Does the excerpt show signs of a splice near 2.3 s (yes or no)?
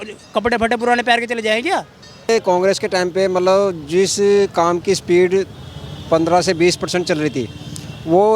yes